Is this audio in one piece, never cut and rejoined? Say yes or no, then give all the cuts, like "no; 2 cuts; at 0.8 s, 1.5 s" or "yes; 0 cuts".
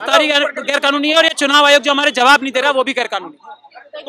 yes; 0 cuts